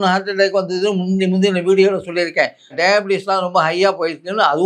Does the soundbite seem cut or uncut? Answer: cut